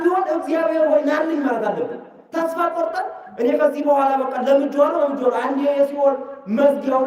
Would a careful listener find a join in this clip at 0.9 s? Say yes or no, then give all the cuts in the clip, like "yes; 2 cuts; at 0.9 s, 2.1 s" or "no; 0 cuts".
no; 0 cuts